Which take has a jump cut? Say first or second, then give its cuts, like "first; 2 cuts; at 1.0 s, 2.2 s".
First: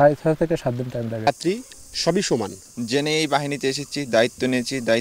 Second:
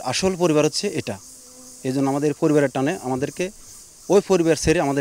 first; 1 cut; at 1.3 s